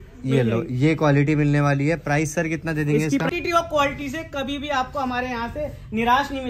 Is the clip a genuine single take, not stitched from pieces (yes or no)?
no